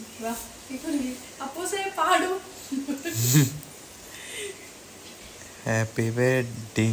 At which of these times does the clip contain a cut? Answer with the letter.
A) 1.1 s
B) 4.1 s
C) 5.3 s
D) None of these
D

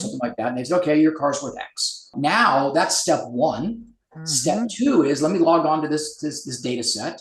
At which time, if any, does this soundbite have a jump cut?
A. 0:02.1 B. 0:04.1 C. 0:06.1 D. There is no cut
A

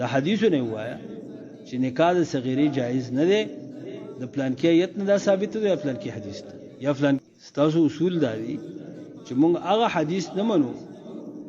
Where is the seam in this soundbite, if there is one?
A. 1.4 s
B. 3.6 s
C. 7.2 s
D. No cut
C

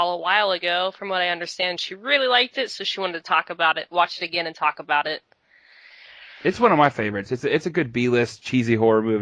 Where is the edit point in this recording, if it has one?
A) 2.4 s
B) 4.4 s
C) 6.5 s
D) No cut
B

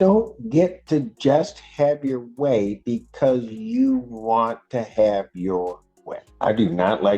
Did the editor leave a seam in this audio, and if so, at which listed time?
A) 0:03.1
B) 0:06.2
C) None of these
B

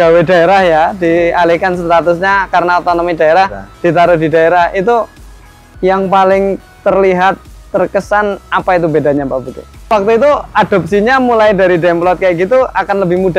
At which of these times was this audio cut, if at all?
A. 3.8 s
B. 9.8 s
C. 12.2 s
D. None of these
B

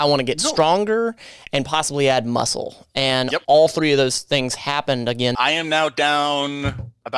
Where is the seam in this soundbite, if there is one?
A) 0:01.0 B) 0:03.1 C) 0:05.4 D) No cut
C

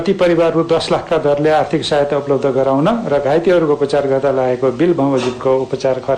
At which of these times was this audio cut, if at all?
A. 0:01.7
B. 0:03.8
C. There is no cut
C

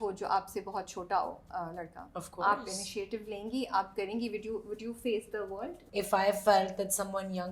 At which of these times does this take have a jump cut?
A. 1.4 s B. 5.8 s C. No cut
B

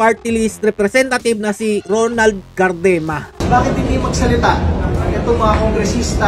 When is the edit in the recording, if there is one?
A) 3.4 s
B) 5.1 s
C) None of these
A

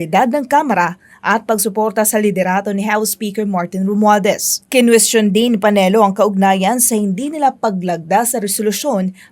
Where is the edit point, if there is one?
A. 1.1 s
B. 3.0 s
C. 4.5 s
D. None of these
C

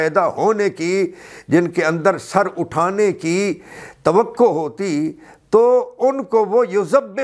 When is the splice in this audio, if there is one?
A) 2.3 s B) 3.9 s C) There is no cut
C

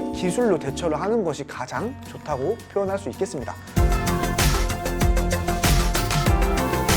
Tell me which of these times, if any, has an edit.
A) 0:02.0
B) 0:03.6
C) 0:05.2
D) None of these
B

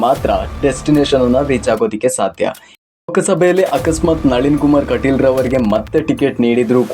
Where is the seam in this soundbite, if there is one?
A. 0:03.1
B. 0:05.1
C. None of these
A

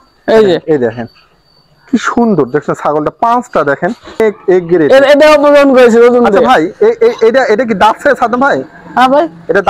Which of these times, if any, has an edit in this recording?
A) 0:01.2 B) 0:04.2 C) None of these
B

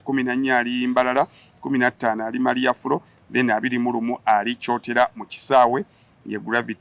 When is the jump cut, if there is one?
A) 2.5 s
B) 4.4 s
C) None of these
C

